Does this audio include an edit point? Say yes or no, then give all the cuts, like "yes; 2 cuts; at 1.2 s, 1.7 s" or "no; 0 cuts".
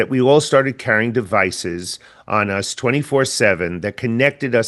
no; 0 cuts